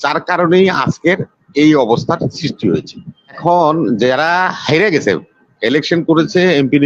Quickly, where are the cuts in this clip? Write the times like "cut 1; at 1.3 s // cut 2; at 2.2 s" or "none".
cut 1; at 3.4 s